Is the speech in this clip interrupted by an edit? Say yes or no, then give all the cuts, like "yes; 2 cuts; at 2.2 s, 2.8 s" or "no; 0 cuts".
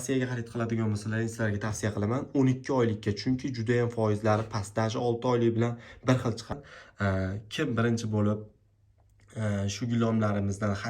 yes; 1 cut; at 6.5 s